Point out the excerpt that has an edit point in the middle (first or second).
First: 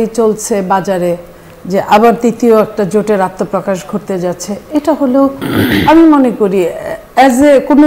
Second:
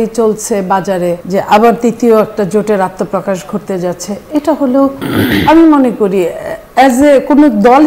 second